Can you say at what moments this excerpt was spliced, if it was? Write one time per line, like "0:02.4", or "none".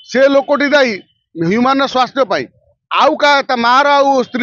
none